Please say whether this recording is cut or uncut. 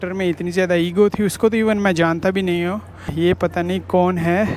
cut